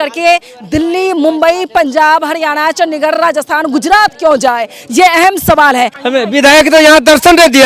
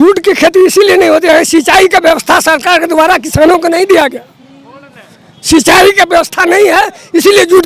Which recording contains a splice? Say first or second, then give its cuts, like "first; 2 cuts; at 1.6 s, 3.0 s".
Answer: first; 1 cut; at 6.0 s